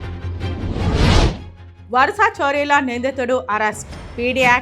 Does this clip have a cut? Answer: yes; 1 cut; at 1.5 s

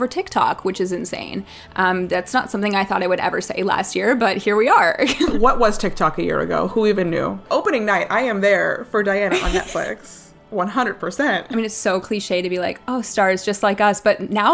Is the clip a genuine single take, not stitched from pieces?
no; 3 cuts; at 5.3 s, 7.4 s, 11.5 s

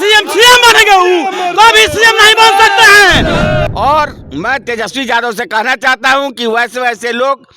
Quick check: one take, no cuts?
no; 1 cut; at 3.7 s

